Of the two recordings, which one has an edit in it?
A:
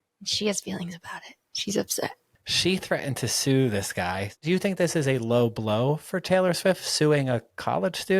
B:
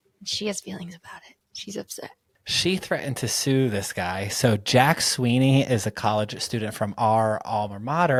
A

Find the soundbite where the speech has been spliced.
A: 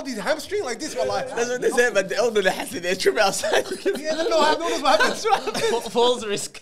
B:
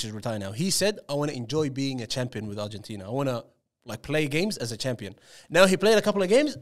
A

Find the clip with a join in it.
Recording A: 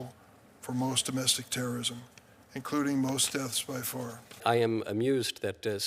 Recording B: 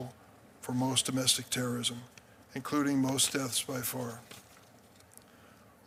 A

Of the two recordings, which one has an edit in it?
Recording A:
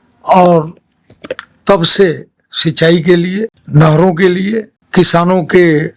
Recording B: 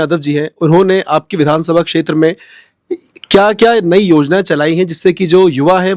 A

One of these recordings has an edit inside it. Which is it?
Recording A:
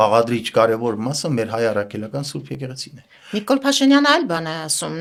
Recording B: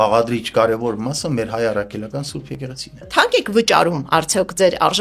B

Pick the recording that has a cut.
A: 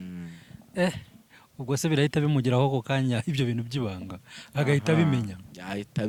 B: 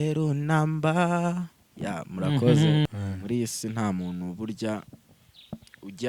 B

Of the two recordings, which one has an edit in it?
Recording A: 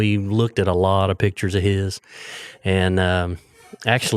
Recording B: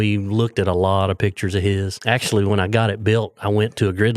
B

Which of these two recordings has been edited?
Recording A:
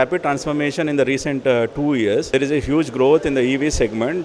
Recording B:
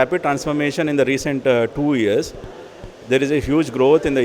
A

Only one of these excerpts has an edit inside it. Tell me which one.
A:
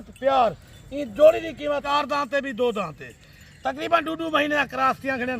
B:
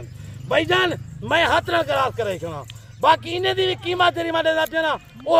A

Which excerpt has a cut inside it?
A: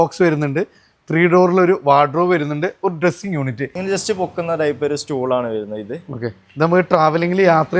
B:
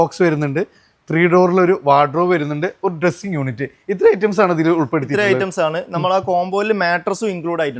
A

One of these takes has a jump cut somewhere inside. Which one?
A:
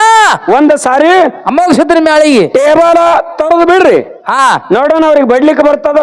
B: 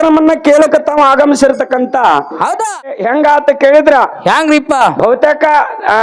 B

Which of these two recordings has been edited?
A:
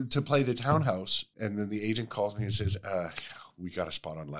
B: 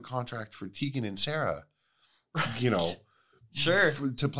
A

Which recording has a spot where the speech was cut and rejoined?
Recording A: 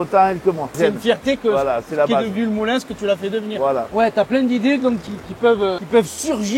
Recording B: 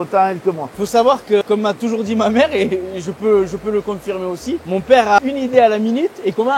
A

